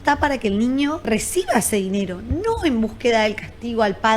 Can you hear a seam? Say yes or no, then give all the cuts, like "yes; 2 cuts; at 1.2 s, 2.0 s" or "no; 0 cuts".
yes; 1 cut; at 1.0 s